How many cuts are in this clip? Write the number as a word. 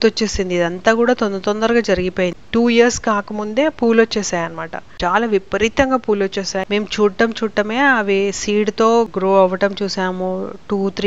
two